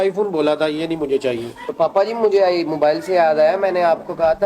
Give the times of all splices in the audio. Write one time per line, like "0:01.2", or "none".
0:01.7